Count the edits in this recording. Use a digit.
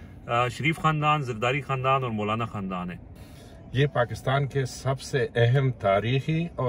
1